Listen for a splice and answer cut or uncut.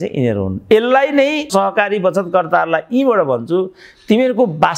cut